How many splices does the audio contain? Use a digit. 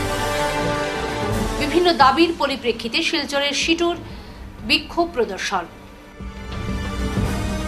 1